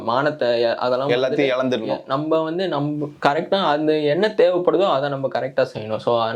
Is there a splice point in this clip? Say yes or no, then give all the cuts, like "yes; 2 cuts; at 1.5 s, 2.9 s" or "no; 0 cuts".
no; 0 cuts